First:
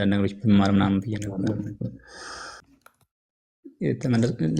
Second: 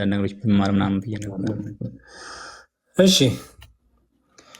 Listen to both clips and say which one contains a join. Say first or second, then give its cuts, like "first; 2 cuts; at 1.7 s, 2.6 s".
first; 1 cut; at 2.8 s